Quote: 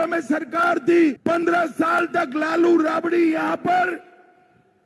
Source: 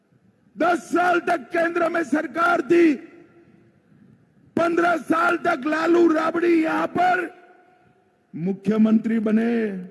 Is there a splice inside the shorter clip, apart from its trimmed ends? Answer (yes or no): yes